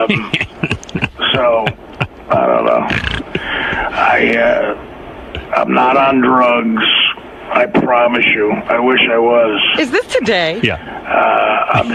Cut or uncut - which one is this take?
uncut